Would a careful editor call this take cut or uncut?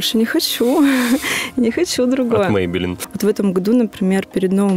cut